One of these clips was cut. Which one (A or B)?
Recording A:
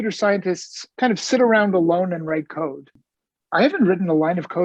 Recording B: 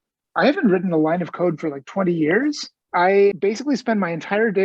B